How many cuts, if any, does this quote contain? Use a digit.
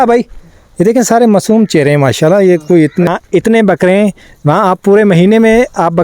1